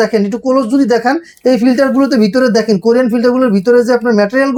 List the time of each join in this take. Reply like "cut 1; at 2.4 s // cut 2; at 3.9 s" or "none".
none